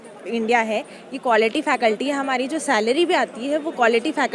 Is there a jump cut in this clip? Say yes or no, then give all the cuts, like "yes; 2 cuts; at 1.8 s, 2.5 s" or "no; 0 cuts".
no; 0 cuts